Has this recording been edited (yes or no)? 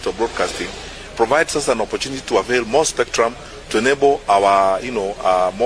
no